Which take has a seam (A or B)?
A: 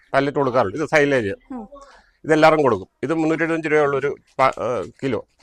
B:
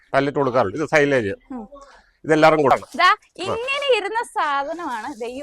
B